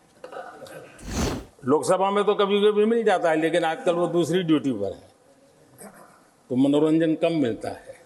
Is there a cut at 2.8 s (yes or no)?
no